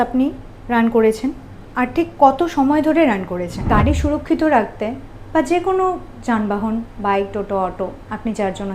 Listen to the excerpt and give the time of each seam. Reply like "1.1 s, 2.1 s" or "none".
3.6 s